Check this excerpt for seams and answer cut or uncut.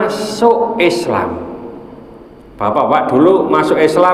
uncut